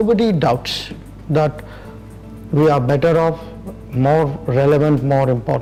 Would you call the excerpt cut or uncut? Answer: uncut